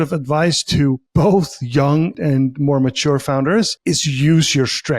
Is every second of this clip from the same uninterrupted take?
no; 3 cuts; at 1.0 s, 2.2 s, 3.8 s

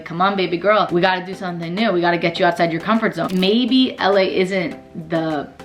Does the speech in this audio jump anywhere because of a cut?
yes; 1 cut; at 3.2 s

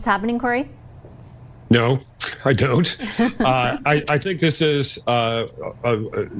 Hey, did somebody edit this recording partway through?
no; 0 cuts

